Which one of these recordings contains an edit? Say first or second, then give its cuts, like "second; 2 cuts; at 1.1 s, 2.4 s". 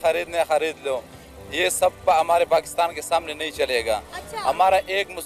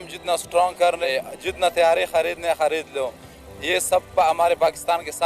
second; 1 cut; at 1.0 s